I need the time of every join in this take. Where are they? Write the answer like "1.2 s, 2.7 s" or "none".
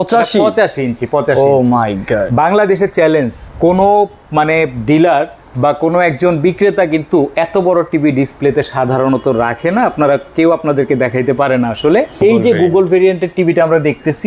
3.4 s, 5.4 s, 12.2 s